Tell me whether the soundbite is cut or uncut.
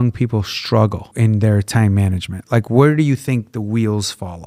uncut